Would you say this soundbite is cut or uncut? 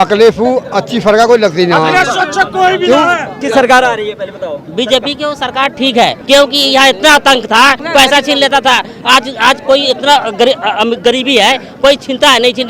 cut